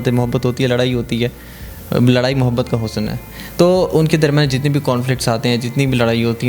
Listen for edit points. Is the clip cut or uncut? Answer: uncut